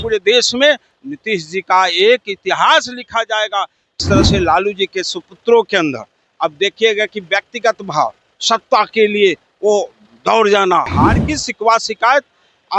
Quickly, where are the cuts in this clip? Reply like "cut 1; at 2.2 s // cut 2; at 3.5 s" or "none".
cut 1; at 4.0 s // cut 2; at 10.9 s